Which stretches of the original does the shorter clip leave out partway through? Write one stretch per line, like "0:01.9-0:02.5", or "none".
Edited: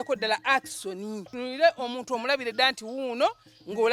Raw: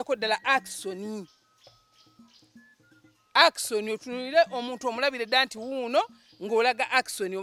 0:01.3-0:04.1